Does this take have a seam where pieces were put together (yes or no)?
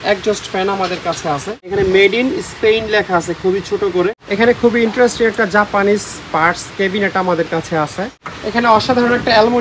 yes